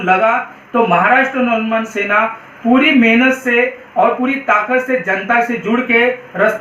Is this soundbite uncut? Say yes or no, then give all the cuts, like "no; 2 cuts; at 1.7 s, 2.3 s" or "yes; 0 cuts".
yes; 0 cuts